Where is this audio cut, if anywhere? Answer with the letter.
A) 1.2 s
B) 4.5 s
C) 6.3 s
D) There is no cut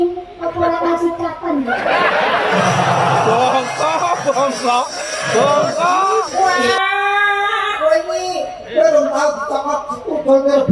C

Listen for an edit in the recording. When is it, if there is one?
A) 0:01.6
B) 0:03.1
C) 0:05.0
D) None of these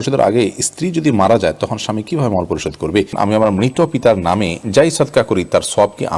B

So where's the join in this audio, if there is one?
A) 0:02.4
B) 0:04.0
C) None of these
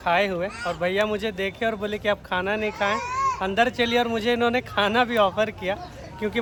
C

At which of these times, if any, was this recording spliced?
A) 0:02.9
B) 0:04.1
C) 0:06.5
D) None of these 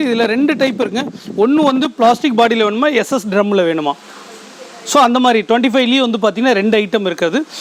D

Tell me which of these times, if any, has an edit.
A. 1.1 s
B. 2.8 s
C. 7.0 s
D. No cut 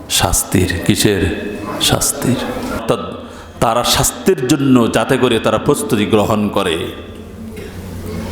B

